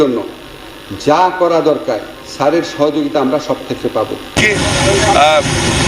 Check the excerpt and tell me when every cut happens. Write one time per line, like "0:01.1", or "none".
0:04.4